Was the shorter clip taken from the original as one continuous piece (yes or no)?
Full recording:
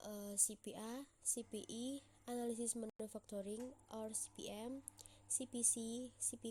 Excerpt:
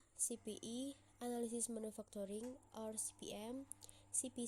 no